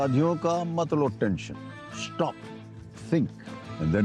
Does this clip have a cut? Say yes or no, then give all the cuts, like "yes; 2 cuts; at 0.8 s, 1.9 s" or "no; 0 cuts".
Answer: no; 0 cuts